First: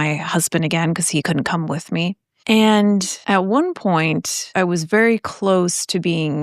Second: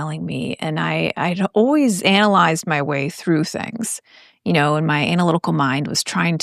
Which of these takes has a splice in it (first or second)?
first